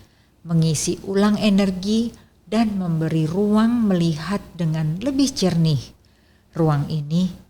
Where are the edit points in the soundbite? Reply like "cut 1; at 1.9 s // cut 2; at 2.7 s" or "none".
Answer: none